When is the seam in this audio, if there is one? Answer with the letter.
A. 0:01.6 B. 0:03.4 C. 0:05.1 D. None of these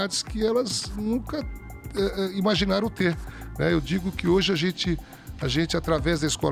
D